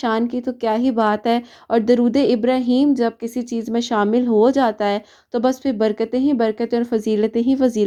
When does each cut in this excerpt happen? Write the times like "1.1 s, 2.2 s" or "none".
none